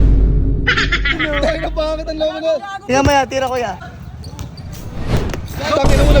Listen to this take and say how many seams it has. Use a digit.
2